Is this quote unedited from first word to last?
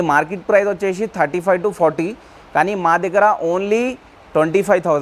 yes; 0 cuts

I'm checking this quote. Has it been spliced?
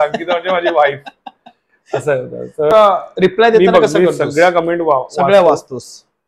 yes; 1 cut; at 2.7 s

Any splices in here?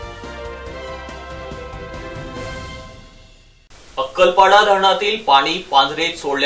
yes; 1 cut; at 3.5 s

